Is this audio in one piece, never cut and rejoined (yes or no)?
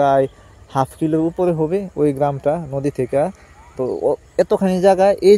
yes